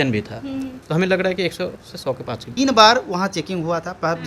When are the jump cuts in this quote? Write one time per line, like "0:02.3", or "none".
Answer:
0:02.5